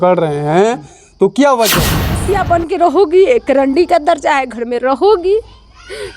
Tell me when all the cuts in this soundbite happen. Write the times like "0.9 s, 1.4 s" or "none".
2.2 s